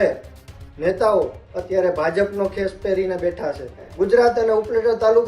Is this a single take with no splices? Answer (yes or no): no